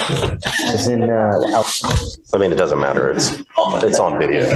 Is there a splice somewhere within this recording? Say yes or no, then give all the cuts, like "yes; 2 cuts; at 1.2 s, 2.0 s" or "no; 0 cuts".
no; 0 cuts